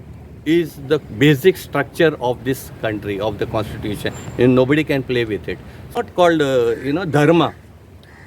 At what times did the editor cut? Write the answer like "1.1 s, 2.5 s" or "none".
6.0 s